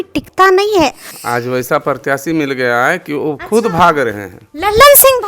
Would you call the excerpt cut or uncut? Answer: cut